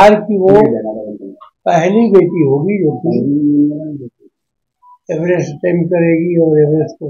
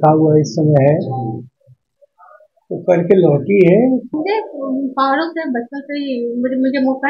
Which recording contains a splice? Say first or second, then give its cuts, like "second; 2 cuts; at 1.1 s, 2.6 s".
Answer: second; 1 cut; at 4.1 s